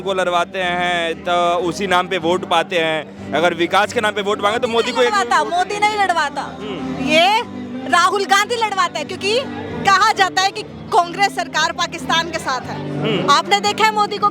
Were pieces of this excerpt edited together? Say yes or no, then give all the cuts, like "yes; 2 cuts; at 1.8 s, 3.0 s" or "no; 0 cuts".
no; 0 cuts